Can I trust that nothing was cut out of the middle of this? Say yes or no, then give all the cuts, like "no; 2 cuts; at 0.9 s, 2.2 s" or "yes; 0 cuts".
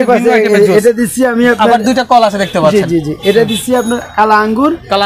yes; 0 cuts